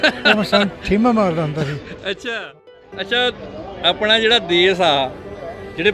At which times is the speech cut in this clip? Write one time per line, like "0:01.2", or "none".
0:02.4

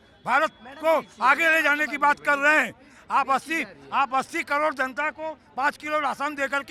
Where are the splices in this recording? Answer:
none

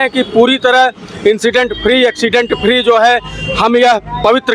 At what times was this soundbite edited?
none

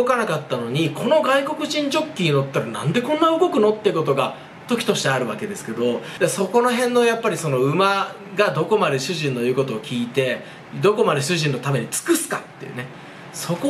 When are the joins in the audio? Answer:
0:06.1

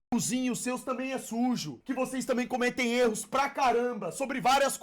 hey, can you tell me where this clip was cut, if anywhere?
0:01.7

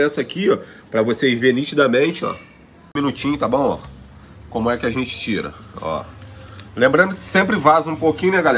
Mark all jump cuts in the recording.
0:02.9

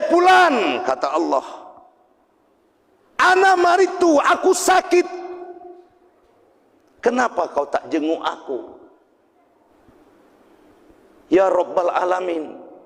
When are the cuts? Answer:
0:03.1
0:09.8

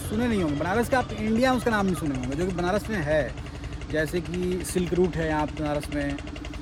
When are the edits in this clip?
none

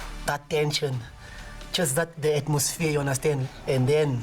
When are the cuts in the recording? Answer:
none

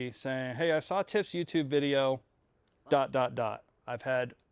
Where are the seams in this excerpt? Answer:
none

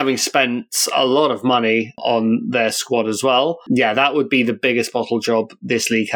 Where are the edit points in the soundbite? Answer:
0:03.6

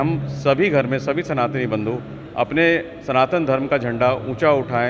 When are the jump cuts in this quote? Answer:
none

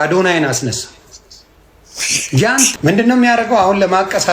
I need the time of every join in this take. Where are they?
0:02.7

